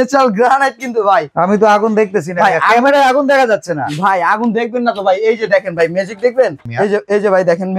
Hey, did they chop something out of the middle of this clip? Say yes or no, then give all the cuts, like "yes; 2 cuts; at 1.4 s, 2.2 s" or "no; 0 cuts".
yes; 2 cuts; at 1.3 s, 6.6 s